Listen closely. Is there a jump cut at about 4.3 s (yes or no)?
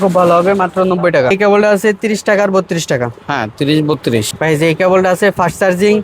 yes